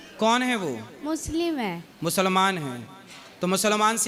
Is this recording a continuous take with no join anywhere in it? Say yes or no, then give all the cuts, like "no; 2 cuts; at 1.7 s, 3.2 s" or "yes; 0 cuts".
yes; 0 cuts